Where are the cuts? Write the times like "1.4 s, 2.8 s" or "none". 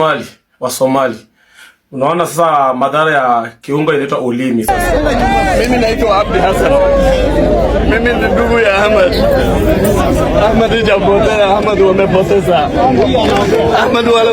4.7 s